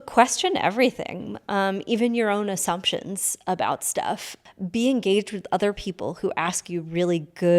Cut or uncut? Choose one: cut